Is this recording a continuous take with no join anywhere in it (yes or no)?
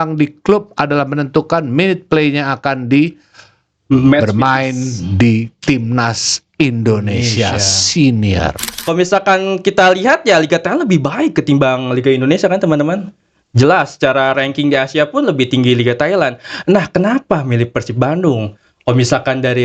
no